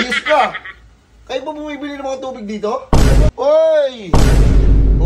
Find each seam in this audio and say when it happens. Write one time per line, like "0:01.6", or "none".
0:03.3